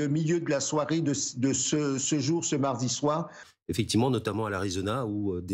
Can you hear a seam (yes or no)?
yes